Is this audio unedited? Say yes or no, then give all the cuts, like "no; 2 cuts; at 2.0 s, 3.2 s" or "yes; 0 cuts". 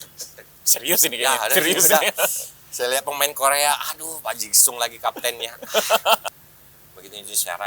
no; 1 cut; at 6.2 s